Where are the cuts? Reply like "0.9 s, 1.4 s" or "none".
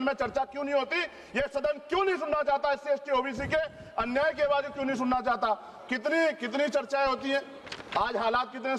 none